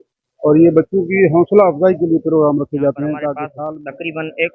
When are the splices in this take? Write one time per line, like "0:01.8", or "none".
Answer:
0:03.5